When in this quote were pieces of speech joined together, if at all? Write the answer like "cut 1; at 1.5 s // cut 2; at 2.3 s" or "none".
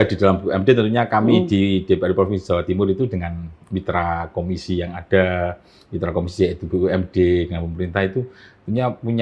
none

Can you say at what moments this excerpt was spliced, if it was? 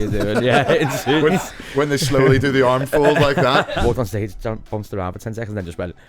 cut 1; at 3.7 s

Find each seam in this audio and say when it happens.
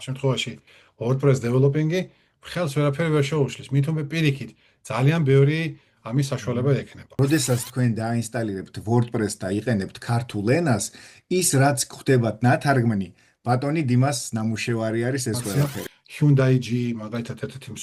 cut 1; at 7.0 s // cut 2; at 15.5 s

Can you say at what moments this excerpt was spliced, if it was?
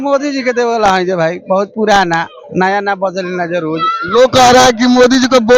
none

